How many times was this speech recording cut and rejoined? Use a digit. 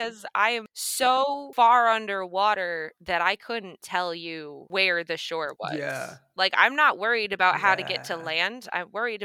0